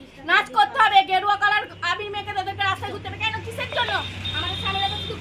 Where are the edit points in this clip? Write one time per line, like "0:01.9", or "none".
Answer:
none